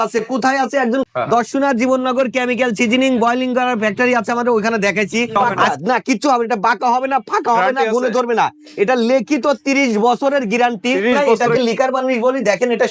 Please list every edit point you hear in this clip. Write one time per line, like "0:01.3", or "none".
0:01.1
0:05.4
0:11.4